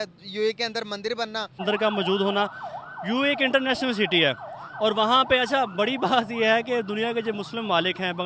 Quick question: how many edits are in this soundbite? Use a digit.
1